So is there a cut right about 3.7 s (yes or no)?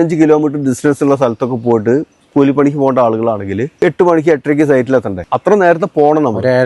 yes